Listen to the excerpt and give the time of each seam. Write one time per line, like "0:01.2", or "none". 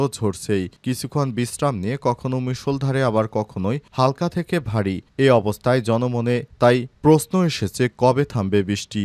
none